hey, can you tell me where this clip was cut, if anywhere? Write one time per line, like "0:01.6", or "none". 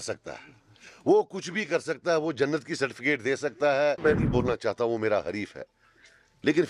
0:04.0